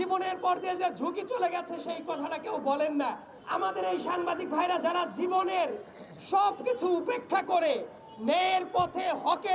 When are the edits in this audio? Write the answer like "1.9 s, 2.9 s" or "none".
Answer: 3.3 s